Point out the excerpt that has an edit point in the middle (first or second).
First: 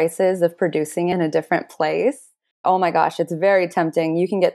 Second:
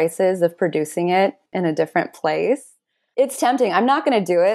first